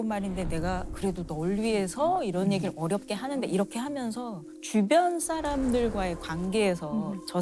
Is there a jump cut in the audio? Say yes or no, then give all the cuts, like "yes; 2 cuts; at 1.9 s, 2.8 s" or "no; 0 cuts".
no; 0 cuts